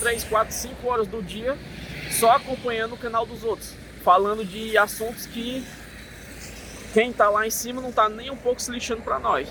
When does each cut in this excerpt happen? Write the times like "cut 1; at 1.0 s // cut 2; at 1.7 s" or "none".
none